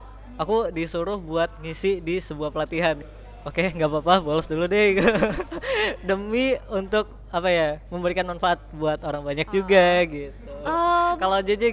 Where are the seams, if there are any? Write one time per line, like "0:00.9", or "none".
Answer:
0:03.1

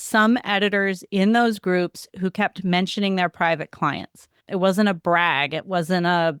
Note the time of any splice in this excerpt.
0:04.4

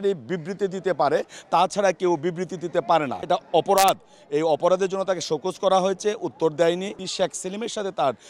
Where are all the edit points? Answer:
0:03.3
0:07.0

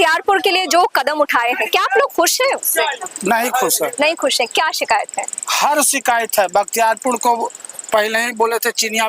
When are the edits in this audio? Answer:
none

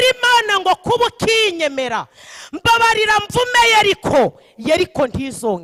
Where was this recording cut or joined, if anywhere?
none

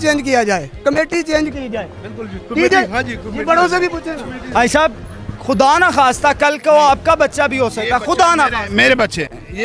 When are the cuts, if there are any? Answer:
none

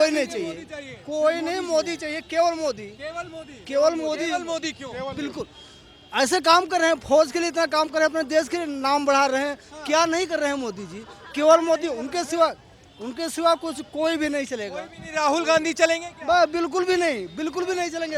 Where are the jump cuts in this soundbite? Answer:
none

